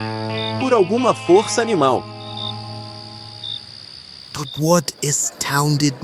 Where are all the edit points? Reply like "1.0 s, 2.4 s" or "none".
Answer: 4.1 s

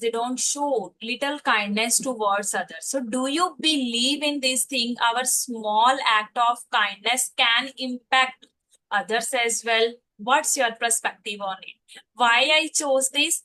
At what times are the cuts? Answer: none

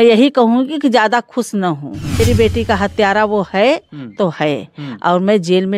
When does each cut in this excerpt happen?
2.2 s

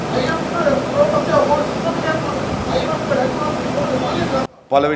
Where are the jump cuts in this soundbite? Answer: none

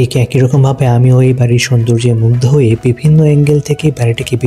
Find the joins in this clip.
none

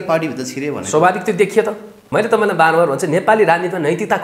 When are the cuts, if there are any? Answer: 1.9 s

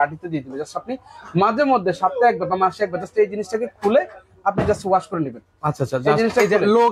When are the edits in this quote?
none

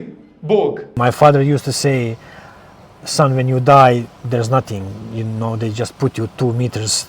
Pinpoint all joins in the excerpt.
1.0 s

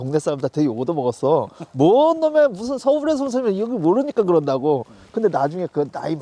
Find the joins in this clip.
none

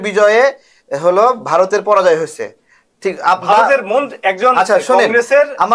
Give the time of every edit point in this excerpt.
none

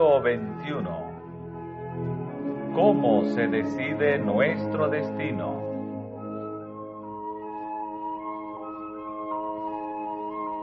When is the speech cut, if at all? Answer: none

